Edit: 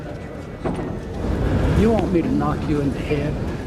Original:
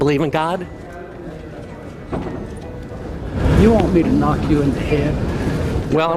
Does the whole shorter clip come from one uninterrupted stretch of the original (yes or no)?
no